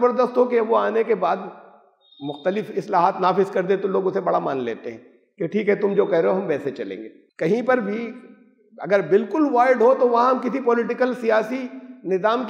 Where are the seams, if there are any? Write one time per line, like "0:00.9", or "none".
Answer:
0:07.2